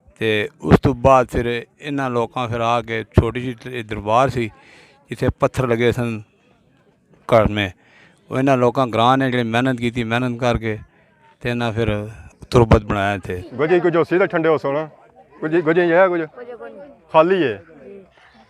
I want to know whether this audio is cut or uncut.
cut